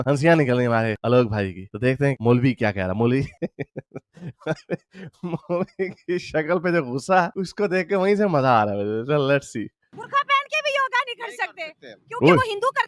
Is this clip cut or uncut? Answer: uncut